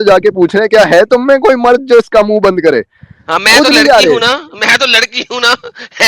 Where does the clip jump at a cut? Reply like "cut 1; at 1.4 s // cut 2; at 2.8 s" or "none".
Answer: none